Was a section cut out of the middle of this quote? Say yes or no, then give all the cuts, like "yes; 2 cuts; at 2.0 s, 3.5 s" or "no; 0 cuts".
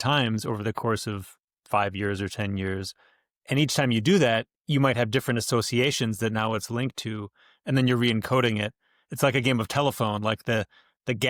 no; 0 cuts